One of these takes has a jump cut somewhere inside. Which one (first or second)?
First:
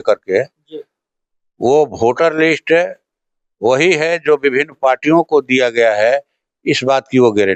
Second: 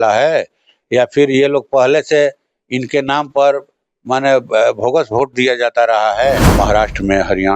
second